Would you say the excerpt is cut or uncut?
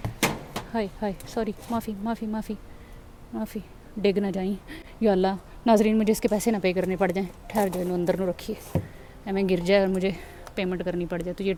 uncut